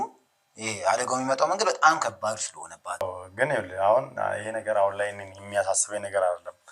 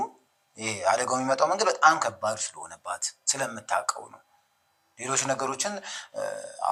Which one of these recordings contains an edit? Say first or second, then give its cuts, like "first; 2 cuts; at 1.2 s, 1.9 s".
first; 1 cut; at 3.0 s